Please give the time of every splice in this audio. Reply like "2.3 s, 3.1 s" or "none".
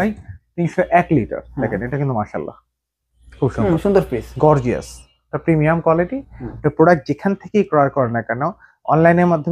6.5 s